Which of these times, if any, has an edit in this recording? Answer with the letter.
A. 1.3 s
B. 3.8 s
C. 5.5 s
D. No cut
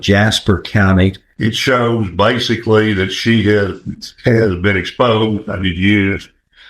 A